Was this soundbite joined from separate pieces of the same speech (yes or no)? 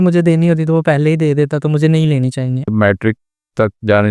yes